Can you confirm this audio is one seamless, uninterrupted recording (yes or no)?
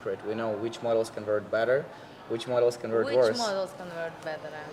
yes